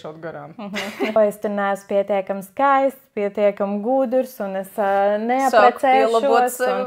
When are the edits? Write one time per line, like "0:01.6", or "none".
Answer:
0:01.2

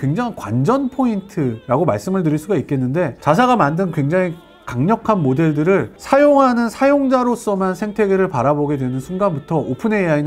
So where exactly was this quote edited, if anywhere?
0:03.2

